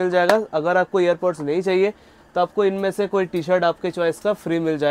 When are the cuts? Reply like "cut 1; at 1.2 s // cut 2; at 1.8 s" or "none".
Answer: none